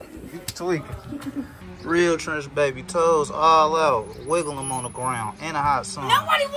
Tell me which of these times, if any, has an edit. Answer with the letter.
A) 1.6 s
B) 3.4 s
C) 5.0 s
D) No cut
A